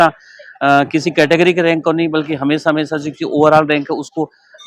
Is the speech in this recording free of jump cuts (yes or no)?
yes